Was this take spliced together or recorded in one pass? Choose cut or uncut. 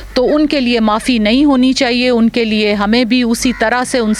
uncut